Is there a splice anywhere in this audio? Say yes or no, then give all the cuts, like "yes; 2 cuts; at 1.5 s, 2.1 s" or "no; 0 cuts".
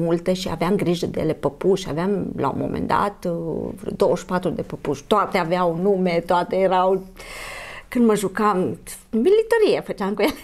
no; 0 cuts